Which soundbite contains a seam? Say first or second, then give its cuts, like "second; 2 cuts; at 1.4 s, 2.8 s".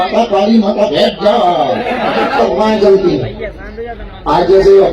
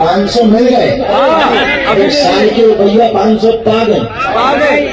first; 1 cut; at 2.4 s